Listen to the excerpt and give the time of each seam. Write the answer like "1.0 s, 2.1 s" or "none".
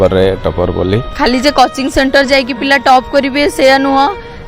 1.1 s